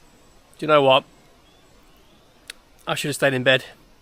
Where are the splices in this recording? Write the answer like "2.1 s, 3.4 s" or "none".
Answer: none